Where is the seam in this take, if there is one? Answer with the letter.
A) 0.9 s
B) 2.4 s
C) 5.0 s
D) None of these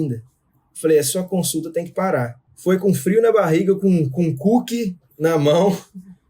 B